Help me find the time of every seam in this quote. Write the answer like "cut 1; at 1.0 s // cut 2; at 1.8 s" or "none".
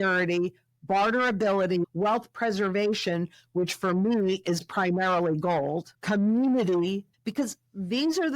cut 1; at 1.9 s // cut 2; at 5.9 s // cut 3; at 7.1 s